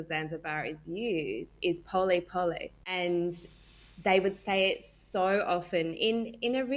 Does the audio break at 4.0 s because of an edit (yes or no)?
no